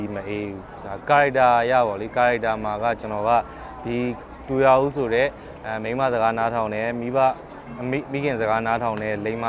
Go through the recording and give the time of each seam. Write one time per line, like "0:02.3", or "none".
none